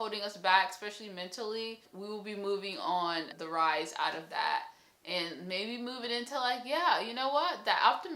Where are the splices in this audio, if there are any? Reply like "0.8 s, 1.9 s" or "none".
1.9 s, 3.4 s